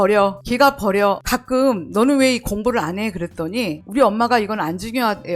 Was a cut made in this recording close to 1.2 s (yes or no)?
yes